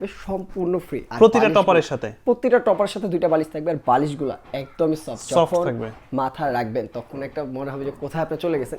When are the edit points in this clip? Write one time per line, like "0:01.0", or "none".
none